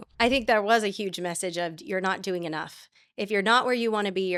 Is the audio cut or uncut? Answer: uncut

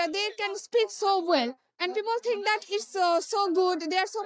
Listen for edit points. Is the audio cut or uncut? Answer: uncut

